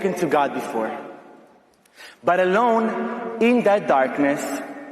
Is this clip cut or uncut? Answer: uncut